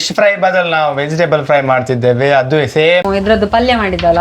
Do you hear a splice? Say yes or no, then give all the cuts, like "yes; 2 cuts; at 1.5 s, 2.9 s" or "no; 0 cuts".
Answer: yes; 1 cut; at 3.0 s